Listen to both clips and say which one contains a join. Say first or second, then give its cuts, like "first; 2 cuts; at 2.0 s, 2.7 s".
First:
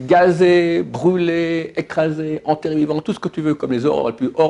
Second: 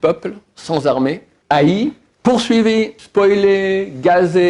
second; 3 cuts; at 1.3 s, 2.1 s, 3.0 s